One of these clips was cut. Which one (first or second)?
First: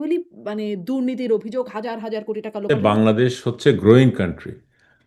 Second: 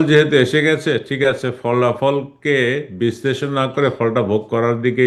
first